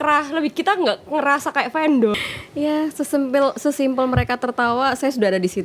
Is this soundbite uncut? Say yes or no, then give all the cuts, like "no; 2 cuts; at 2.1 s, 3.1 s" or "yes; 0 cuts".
no; 1 cut; at 2.2 s